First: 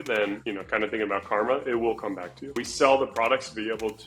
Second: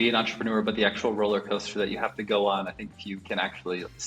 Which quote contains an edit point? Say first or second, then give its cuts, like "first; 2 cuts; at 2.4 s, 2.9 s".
first; 1 cut; at 2.6 s